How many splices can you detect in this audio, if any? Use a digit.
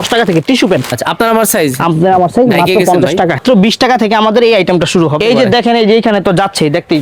3